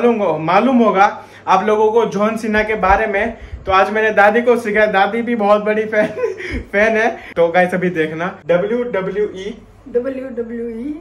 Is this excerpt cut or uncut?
cut